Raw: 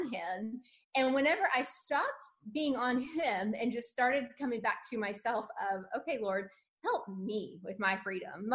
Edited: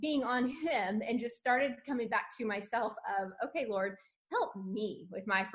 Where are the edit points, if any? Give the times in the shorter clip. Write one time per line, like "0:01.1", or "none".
none